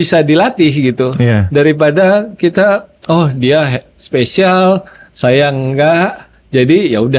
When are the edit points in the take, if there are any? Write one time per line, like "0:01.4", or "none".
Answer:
none